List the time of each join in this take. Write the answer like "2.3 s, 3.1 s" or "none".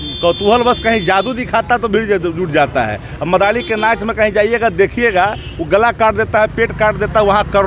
none

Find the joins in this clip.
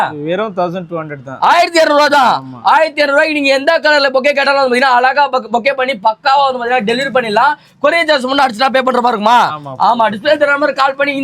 none

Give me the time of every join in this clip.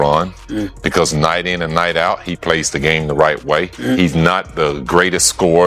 none

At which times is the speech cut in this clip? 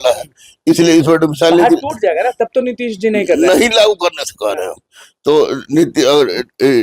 none

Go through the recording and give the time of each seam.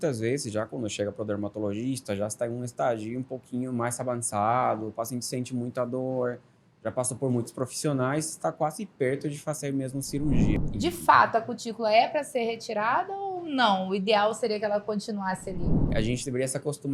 10.6 s, 15.8 s

